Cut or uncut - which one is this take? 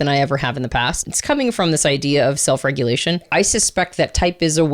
cut